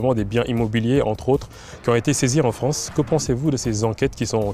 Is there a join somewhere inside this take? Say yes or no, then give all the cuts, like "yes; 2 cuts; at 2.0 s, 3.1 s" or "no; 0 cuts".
no; 0 cuts